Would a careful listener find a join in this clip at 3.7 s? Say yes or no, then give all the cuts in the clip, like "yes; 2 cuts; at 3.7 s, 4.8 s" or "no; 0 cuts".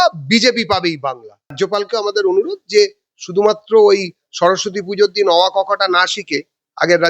no; 1 cut; at 1.5 s